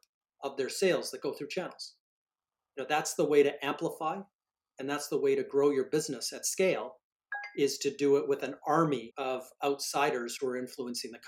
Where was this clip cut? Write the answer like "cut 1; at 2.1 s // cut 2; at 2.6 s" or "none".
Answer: cut 1; at 9.1 s